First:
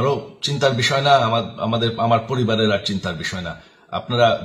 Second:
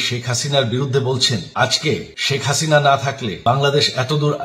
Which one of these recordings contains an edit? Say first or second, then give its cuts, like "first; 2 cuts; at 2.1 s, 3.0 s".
second; 3 cuts; at 1.5 s, 2.1 s, 3.3 s